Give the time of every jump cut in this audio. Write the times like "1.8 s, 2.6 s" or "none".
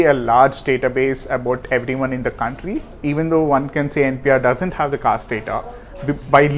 2.9 s